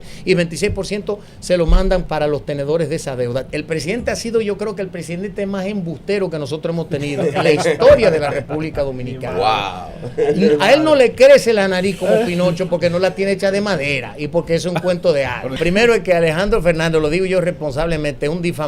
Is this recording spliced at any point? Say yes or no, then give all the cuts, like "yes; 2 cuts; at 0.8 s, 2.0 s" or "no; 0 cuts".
yes; 3 cuts; at 2.0 s, 3.5 s, 15.6 s